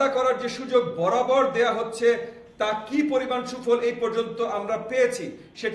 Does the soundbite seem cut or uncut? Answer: uncut